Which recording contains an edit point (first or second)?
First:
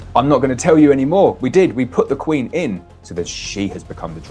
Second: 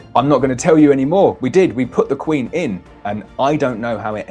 first